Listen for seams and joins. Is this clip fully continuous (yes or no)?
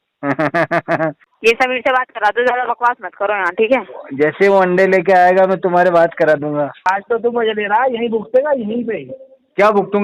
no